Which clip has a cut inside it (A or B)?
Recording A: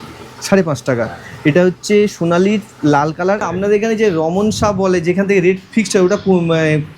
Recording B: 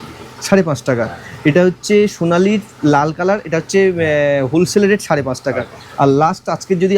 A